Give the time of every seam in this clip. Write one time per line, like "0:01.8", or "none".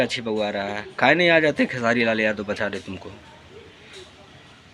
0:03.3